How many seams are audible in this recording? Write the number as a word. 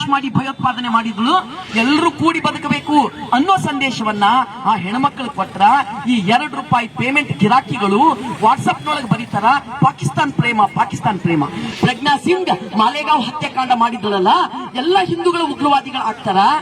one